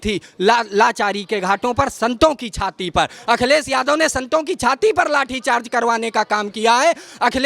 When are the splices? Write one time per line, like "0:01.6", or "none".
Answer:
none